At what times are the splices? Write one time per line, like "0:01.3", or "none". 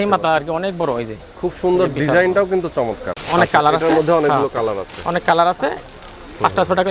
0:03.1